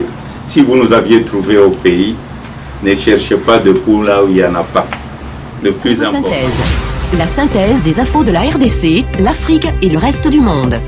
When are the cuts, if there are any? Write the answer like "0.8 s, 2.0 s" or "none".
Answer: 6.2 s